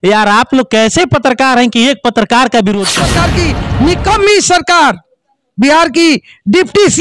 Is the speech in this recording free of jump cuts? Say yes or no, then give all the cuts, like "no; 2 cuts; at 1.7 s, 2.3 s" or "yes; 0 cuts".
no; 1 cut; at 3.1 s